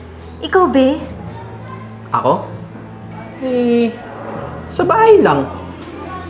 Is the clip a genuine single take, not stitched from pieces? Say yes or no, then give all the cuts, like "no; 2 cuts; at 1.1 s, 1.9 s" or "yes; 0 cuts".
yes; 0 cuts